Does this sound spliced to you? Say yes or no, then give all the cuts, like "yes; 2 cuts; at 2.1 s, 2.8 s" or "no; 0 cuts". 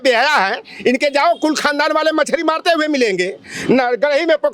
no; 0 cuts